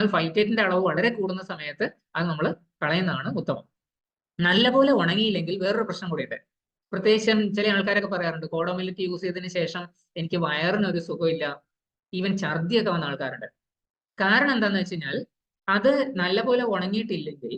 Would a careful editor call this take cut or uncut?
uncut